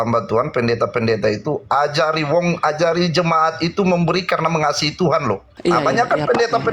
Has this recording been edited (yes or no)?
yes